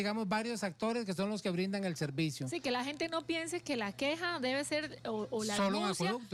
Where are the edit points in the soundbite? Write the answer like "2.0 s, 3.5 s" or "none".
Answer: none

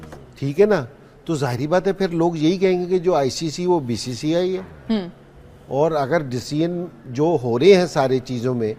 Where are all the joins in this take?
none

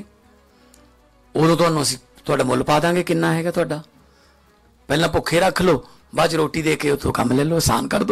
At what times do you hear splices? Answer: none

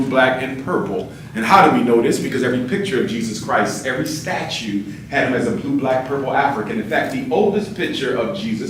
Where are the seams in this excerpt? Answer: none

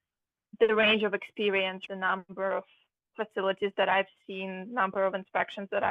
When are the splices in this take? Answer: 1.8 s

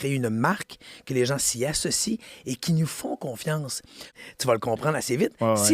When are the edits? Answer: 4.1 s

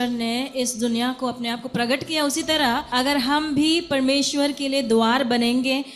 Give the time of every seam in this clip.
2.9 s

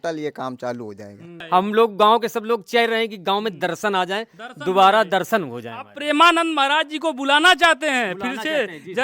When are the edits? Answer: 1.3 s

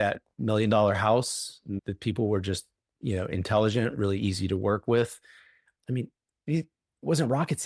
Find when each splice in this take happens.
5.7 s

